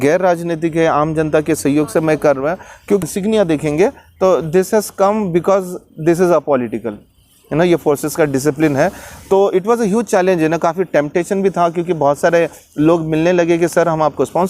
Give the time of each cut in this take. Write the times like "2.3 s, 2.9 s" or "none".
3.0 s